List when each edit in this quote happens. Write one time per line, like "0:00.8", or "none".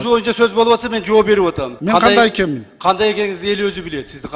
0:01.7